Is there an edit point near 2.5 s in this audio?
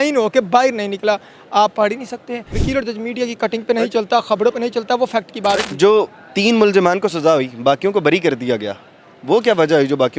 yes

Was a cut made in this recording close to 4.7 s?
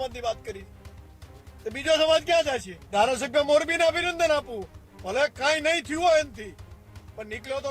no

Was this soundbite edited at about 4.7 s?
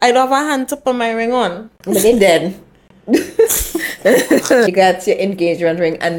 yes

